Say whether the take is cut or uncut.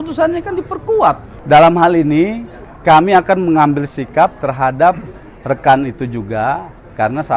cut